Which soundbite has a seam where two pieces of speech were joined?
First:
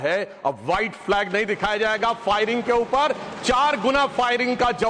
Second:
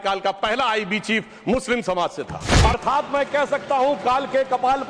second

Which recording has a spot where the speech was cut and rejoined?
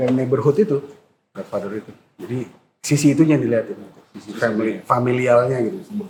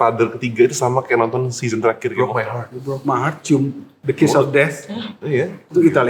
second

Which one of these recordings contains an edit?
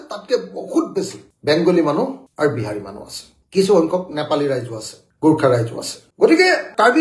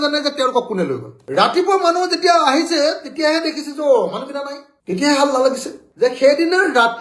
second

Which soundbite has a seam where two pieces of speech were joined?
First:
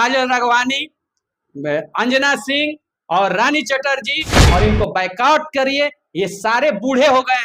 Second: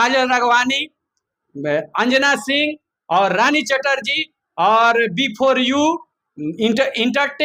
first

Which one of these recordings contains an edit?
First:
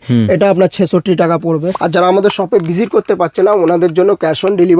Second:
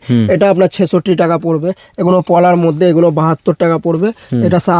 first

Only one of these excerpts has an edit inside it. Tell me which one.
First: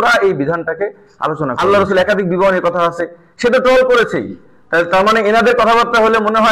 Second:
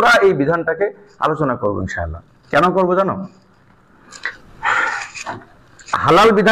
first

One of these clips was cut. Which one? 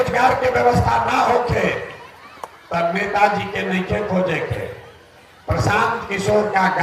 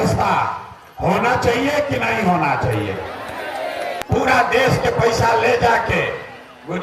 second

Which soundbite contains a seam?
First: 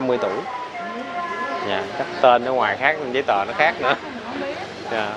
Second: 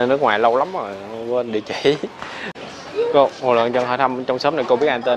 second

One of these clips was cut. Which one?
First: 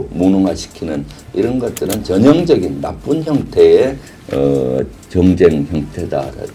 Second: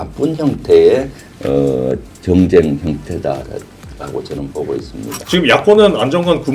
second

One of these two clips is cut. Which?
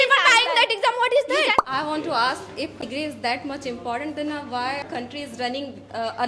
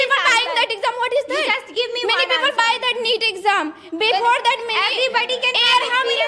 first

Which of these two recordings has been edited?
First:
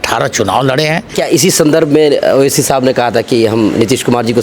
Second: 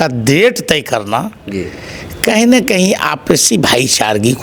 first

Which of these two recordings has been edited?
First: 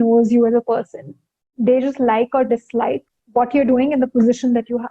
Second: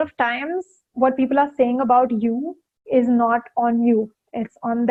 first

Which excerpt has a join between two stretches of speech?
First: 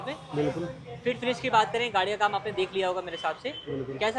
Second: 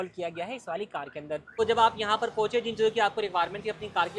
second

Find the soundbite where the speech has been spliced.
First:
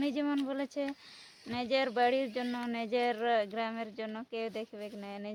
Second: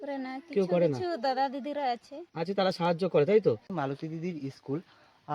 second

